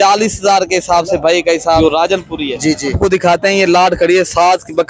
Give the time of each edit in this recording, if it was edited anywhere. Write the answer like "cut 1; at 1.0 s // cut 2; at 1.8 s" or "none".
cut 1; at 1.8 s // cut 2; at 3.0 s